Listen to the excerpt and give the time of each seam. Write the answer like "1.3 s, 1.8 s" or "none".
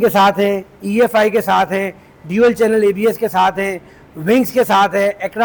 none